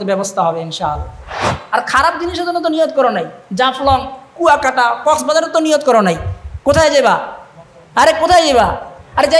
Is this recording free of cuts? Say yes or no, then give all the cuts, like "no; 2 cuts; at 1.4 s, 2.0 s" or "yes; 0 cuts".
no; 1 cut; at 1.5 s